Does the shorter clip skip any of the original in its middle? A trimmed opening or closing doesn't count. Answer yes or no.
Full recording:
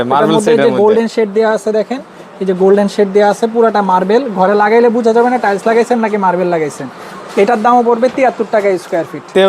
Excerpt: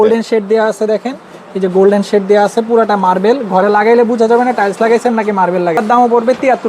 yes